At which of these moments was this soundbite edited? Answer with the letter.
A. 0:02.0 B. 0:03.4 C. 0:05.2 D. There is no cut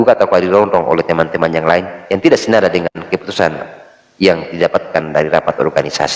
A